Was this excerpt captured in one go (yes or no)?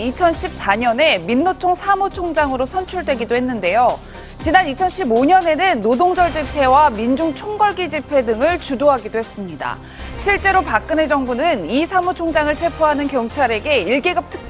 yes